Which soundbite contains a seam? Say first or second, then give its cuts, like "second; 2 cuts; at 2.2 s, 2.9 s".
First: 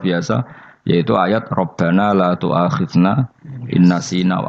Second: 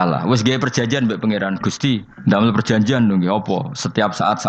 second; 1 cut; at 2.1 s